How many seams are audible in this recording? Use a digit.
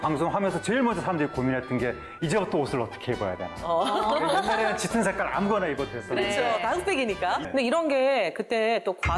1